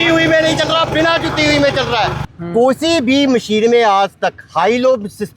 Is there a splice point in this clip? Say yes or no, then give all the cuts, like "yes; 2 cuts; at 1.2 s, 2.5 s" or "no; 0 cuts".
yes; 1 cut; at 2.2 s